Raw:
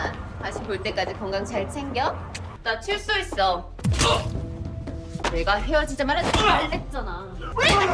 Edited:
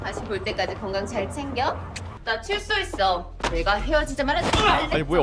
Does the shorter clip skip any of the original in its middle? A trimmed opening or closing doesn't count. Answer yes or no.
yes